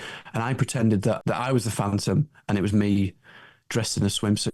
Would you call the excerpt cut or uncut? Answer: cut